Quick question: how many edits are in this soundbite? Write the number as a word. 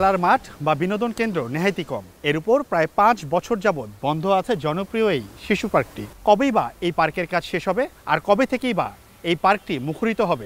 three